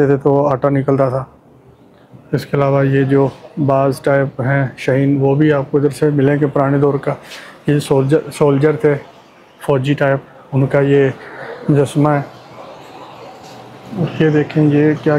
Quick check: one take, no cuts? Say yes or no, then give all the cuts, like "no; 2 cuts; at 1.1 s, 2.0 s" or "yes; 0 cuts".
yes; 0 cuts